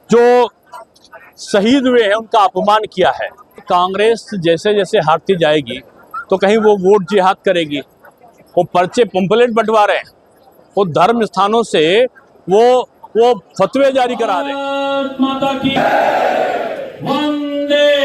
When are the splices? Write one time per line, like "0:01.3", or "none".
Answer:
0:03.6
0:14.5